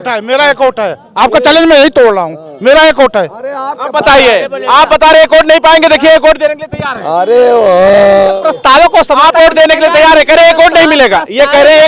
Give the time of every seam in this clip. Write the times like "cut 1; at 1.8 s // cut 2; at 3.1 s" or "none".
none